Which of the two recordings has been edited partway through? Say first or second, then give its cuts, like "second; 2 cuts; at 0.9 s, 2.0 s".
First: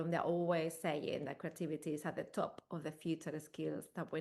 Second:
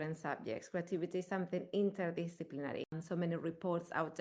second; 1 cut; at 2.9 s